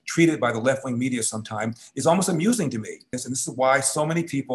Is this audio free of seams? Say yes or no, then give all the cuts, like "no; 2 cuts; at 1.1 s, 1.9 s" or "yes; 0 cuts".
no; 1 cut; at 3.2 s